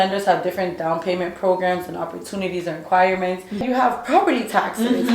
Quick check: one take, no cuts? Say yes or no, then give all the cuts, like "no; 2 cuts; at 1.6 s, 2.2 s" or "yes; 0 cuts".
no; 1 cut; at 3.6 s